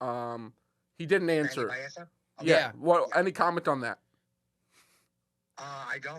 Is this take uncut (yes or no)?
yes